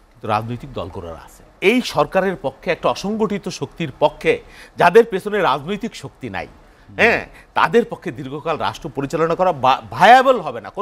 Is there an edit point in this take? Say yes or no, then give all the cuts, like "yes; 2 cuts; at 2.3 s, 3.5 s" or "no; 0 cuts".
yes; 1 cut; at 1.5 s